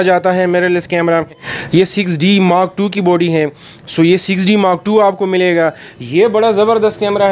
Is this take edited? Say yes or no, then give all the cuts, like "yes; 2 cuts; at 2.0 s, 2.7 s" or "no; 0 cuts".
yes; 1 cut; at 1.5 s